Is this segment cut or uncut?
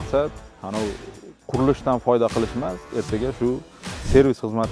uncut